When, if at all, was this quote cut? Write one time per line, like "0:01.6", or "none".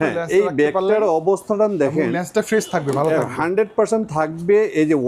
none